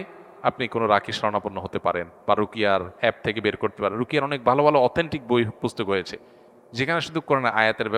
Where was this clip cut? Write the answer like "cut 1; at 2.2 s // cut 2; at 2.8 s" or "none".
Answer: none